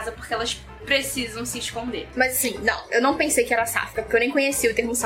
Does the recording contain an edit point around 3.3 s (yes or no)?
no